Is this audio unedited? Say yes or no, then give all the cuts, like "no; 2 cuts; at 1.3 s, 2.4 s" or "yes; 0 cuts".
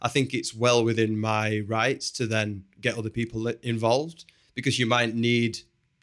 yes; 0 cuts